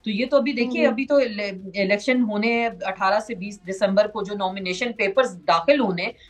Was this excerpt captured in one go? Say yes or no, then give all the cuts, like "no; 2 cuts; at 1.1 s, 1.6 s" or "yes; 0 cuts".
yes; 0 cuts